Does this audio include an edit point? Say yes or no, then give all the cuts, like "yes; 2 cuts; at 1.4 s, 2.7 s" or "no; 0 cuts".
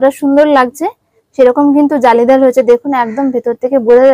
no; 0 cuts